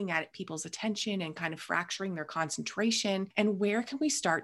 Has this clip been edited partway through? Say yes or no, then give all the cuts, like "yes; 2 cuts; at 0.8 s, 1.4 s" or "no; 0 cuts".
yes; 1 cut; at 3.3 s